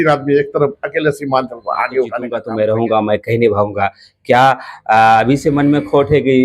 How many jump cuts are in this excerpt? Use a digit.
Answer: 1